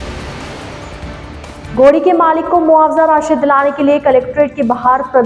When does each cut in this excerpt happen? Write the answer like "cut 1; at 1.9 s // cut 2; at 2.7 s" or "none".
cut 1; at 1.7 s